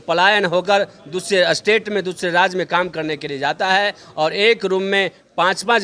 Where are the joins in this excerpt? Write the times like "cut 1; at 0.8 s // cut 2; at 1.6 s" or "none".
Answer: none